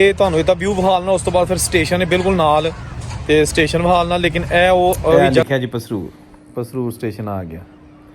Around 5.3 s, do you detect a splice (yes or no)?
yes